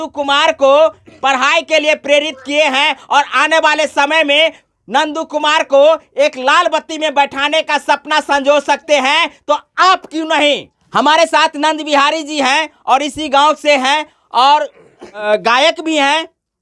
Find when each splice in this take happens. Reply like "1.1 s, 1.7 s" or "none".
none